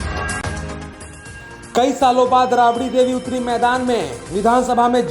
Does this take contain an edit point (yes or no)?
yes